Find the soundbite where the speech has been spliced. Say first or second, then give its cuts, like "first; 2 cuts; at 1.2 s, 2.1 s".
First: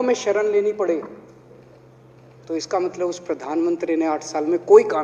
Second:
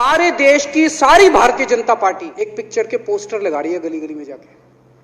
second; 1 cut; at 2.3 s